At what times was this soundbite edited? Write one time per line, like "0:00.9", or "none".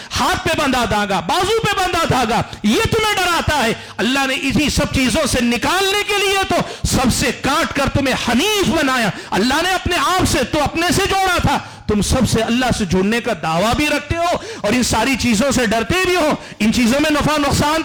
none